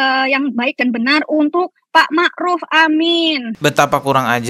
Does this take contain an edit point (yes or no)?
yes